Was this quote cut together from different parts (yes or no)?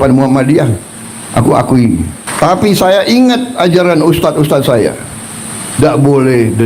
yes